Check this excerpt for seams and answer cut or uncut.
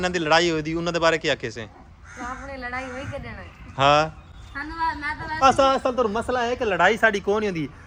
uncut